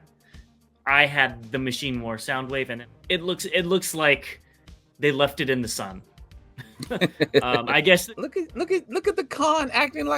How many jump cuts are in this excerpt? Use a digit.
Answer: 2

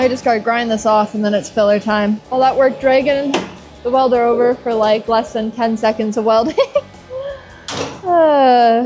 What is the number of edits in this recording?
0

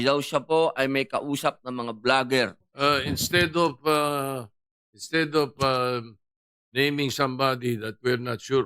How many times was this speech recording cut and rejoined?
1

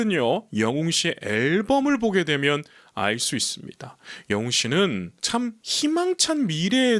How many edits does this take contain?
0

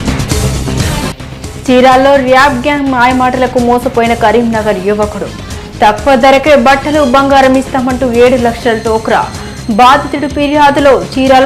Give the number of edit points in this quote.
1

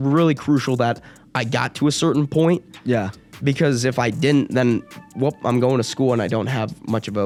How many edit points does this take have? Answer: 0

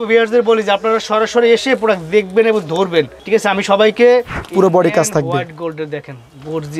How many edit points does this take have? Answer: 2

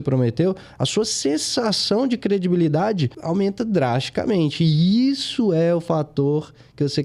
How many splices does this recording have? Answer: 1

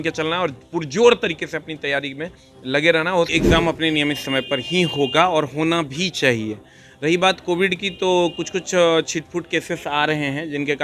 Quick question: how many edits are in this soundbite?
1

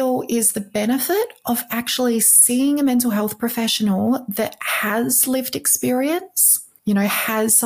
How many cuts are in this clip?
1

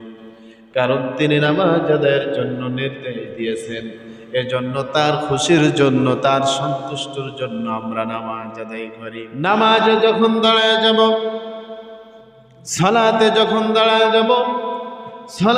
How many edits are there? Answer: 1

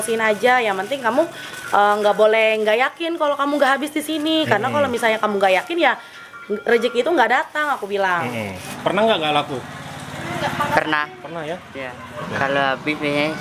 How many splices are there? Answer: 2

